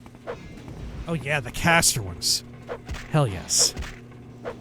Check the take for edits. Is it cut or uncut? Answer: uncut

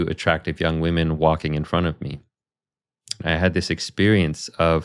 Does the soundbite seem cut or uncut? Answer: cut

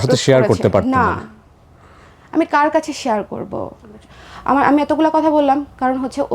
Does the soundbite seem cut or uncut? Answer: cut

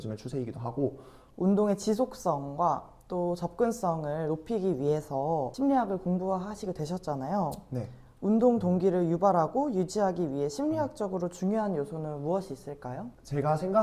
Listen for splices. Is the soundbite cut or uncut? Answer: cut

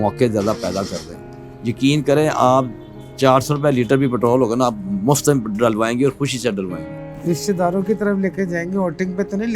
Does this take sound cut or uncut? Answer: cut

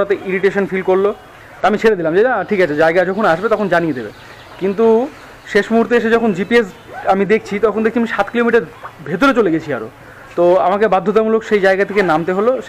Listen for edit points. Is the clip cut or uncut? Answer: uncut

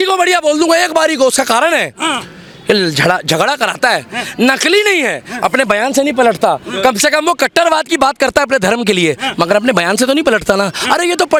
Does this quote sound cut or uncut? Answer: uncut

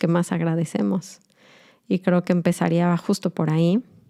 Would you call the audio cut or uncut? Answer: uncut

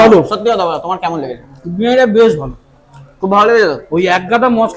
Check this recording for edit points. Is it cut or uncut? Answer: uncut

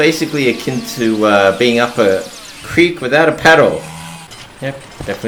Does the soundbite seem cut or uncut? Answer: uncut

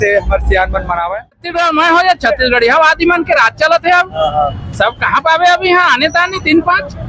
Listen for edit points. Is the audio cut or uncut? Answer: cut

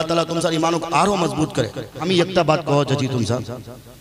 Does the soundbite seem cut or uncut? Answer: cut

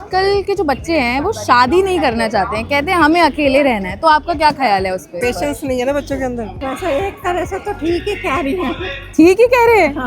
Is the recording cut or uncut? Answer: uncut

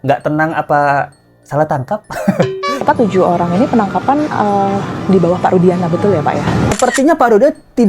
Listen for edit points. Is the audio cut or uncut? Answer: cut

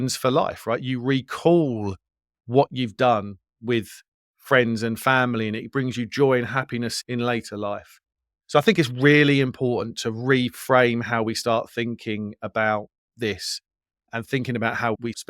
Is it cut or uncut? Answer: uncut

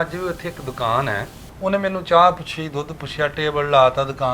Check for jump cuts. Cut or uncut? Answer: cut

